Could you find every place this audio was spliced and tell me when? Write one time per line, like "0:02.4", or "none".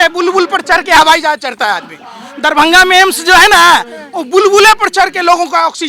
none